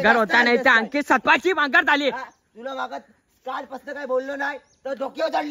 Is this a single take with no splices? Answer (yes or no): yes